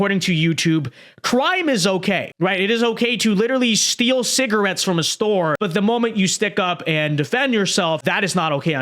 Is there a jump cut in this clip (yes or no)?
yes